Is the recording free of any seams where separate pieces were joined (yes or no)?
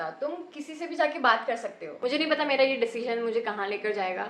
no